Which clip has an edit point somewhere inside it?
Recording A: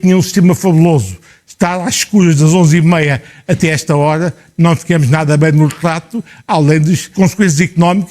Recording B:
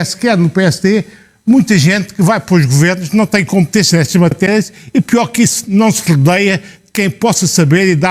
A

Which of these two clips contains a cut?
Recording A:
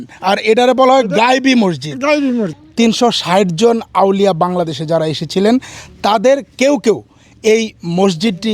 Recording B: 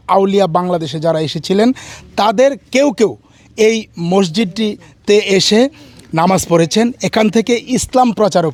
A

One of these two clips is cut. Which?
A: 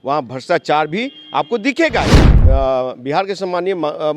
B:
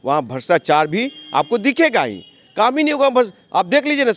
A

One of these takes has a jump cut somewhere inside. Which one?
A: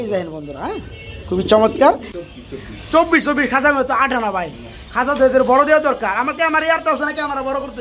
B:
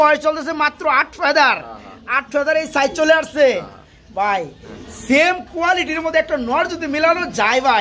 A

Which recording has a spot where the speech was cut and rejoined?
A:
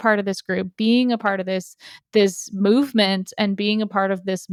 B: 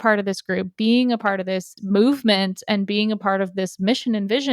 B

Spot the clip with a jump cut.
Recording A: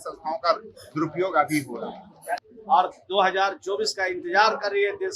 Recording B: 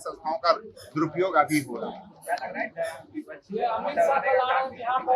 A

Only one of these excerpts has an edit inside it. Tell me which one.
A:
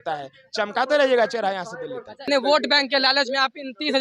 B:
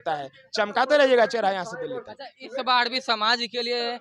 A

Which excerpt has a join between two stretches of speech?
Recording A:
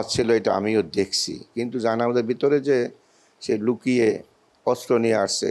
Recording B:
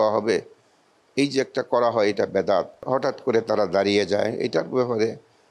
B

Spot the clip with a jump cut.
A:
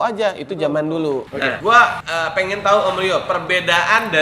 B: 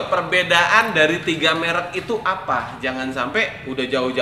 A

